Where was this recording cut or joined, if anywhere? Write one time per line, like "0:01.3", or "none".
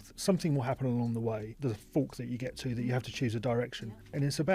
0:01.5